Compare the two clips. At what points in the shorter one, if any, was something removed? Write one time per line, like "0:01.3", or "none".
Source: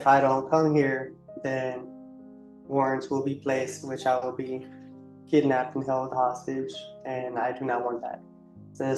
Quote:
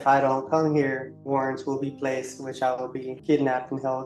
0:01.1
0:03.1

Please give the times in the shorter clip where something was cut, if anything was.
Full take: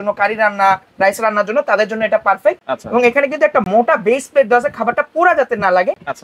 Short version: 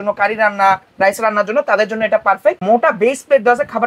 0:02.6

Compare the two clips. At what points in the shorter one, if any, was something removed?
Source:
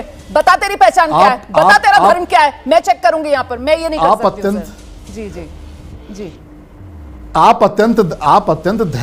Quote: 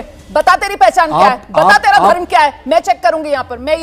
none

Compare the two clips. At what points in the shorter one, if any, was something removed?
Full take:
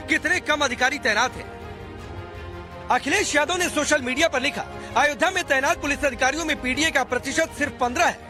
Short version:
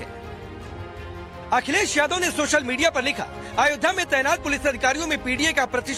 none

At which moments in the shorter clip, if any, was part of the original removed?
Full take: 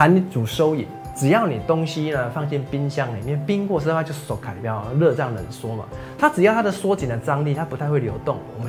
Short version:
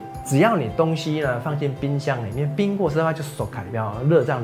none

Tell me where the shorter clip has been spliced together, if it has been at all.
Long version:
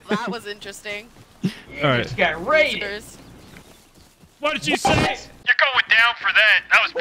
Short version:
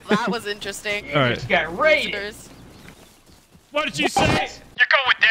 0:01.0

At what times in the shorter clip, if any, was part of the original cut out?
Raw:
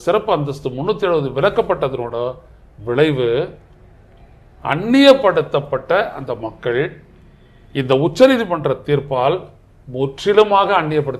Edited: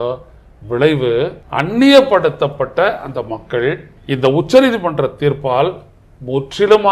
0:01.4
0:03.9

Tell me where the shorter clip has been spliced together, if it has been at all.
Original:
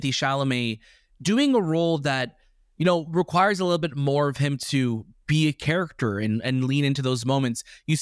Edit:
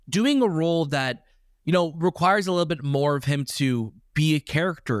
none

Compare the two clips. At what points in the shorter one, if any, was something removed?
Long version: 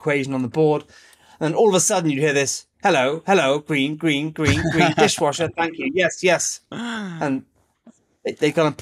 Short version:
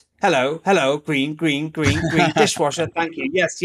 none

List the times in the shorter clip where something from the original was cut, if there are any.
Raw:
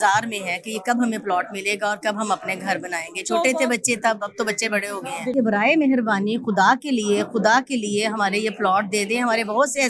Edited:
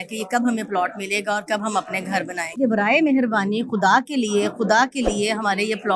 0:02.6

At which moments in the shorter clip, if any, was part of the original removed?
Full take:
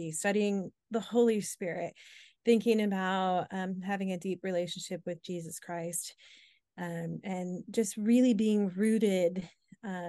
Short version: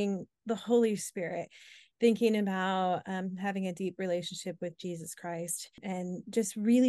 0:05.8

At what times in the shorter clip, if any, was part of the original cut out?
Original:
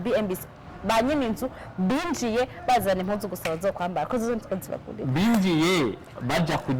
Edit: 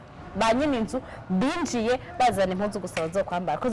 none

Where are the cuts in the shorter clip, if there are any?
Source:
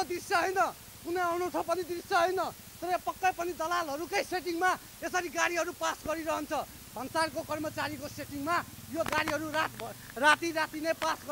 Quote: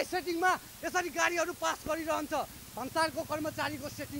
none

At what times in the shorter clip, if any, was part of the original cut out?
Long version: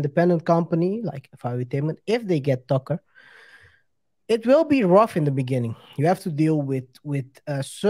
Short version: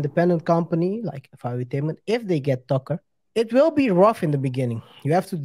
0:03.1

